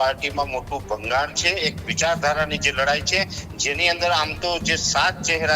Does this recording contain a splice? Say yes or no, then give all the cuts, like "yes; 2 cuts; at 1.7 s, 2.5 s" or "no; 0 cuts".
no; 0 cuts